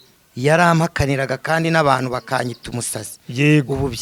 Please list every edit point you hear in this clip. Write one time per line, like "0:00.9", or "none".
none